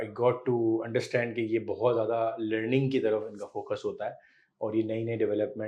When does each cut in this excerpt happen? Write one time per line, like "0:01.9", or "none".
none